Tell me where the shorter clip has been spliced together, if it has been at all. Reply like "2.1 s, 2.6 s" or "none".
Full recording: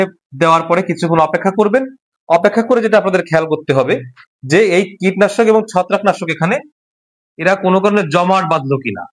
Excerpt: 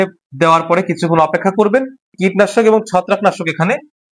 2.1 s